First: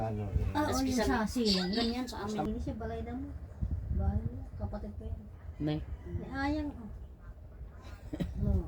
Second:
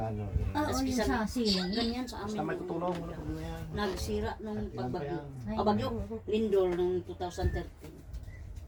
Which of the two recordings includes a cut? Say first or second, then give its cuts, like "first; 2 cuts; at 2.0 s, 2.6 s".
first; 1 cut; at 2.5 s